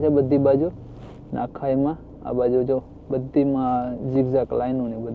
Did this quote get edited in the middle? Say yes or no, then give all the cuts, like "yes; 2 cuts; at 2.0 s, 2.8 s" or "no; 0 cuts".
no; 0 cuts